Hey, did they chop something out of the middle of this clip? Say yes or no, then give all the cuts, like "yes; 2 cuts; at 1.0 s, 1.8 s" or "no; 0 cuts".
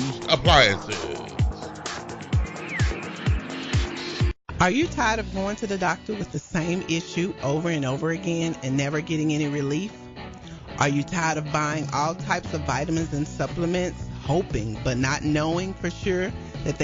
yes; 1 cut; at 4.4 s